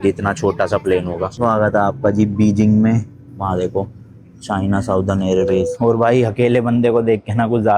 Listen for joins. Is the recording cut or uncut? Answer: cut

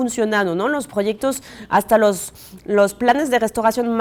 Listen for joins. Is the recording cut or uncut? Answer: uncut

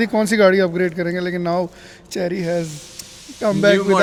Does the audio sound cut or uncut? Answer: uncut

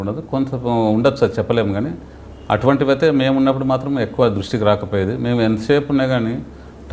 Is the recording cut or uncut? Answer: uncut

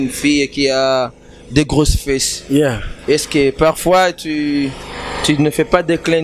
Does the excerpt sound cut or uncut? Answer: uncut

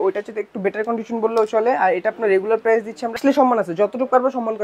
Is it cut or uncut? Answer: cut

